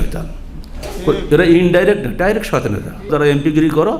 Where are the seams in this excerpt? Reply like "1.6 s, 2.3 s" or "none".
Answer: 3.1 s